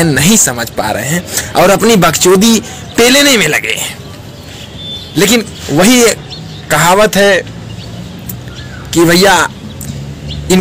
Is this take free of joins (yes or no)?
yes